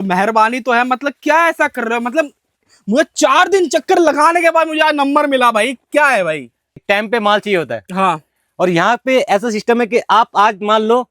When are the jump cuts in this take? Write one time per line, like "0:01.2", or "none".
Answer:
0:06.7